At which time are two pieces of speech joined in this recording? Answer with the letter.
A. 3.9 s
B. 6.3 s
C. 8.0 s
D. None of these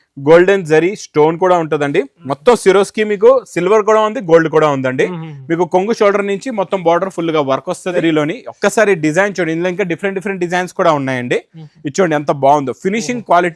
C